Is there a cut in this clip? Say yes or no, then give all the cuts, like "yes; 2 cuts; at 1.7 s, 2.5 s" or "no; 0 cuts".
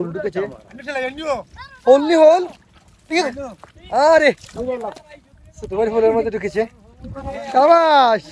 no; 0 cuts